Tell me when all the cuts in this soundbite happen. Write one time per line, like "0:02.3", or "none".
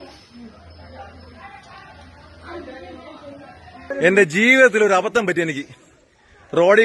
0:03.8